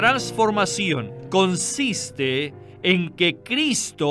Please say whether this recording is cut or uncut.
cut